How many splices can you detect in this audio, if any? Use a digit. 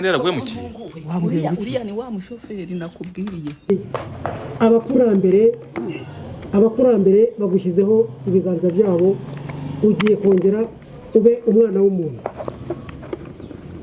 1